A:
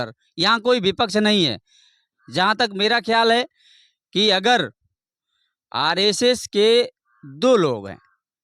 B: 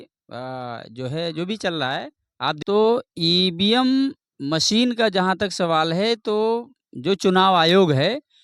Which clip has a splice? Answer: B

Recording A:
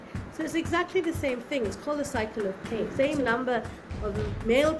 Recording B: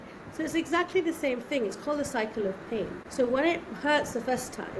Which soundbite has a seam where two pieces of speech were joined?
A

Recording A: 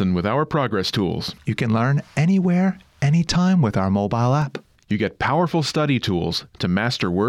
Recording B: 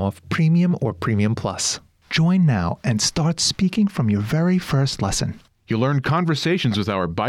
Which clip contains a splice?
B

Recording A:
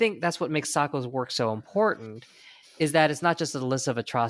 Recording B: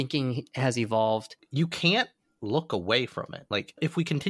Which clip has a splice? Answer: B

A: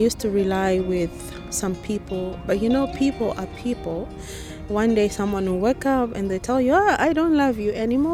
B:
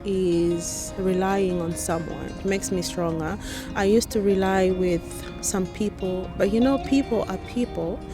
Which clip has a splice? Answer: B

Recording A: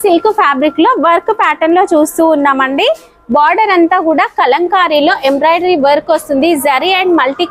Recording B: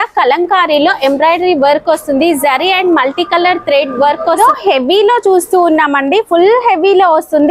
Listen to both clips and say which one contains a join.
B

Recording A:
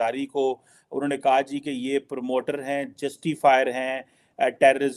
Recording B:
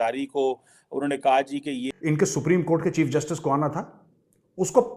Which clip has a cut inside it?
B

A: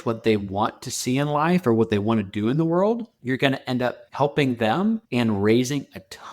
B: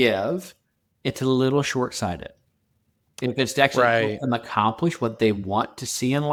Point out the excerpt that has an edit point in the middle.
A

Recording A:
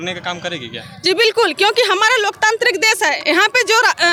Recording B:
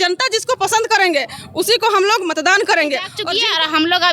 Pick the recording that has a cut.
B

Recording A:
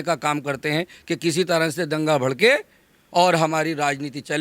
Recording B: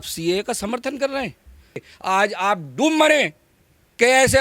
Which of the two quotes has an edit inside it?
B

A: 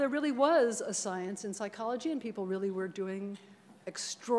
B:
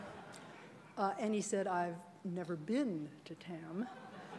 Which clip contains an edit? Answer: B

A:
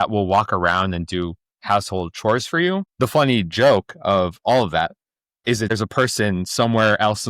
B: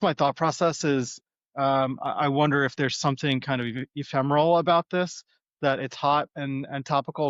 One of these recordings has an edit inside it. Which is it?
A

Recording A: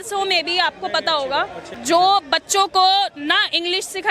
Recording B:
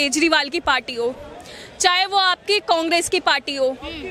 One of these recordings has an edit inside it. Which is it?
A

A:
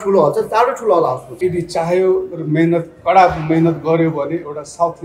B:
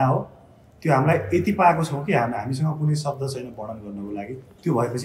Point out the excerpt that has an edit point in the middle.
A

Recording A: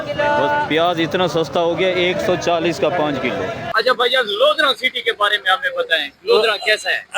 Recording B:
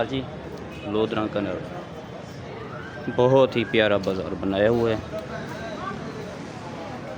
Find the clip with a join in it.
A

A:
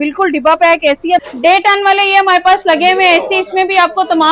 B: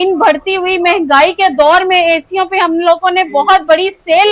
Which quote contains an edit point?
A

